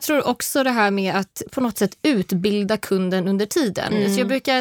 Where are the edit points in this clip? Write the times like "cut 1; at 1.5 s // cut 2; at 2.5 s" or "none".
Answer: cut 1; at 1.4 s

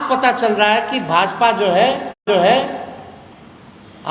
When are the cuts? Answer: none

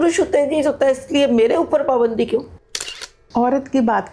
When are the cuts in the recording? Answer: cut 1; at 3.1 s

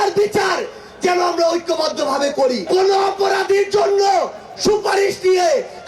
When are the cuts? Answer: cut 1; at 2.6 s

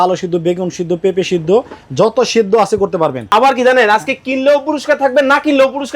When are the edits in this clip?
cut 1; at 3.2 s

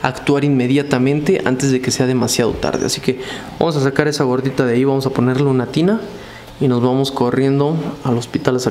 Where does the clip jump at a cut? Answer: none

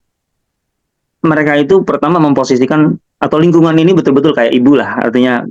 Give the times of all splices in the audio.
none

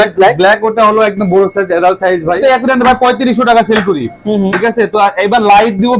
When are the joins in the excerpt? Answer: cut 1; at 2.4 s

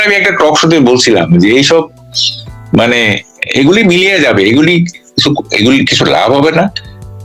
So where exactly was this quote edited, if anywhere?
none

